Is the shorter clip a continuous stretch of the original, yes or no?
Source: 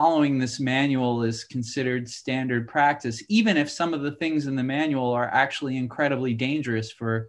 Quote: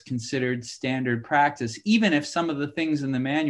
yes